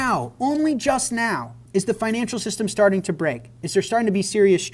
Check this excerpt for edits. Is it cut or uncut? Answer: cut